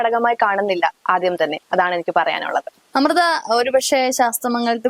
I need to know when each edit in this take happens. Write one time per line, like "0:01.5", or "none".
none